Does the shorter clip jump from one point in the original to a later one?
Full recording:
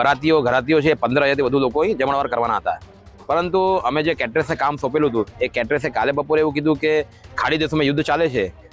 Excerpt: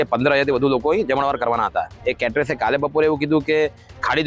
yes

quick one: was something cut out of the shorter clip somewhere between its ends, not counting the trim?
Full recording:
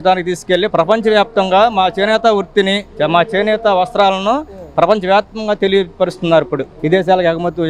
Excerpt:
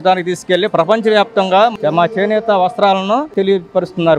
yes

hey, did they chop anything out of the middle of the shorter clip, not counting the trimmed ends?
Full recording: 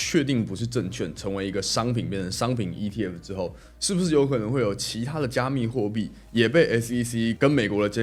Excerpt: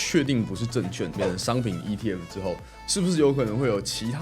yes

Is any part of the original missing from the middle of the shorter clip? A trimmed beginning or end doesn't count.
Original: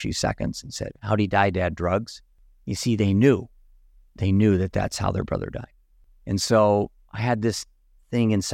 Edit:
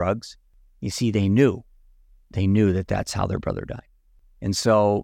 no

